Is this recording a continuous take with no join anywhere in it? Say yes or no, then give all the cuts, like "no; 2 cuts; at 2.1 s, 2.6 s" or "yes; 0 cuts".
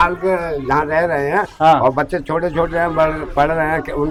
yes; 0 cuts